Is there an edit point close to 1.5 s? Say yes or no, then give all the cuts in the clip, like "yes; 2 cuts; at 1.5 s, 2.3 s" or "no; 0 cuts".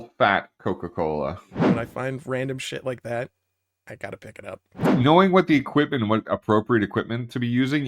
yes; 2 cuts; at 1.5 s, 4.9 s